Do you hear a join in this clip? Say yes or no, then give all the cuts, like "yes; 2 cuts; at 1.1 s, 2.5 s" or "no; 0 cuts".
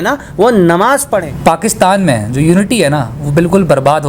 yes; 1 cut; at 1.0 s